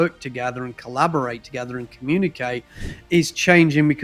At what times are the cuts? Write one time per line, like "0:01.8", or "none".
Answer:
none